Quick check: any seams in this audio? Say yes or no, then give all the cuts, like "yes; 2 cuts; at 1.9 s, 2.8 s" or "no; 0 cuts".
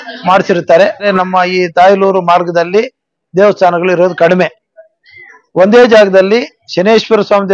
yes; 1 cut; at 1.0 s